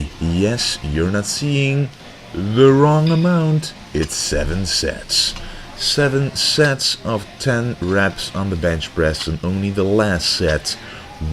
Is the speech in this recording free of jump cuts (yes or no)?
no